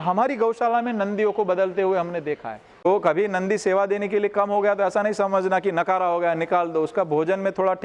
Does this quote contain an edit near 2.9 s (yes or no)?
yes